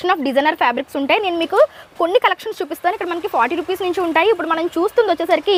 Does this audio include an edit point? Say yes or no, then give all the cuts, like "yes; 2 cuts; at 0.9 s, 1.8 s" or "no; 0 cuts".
no; 0 cuts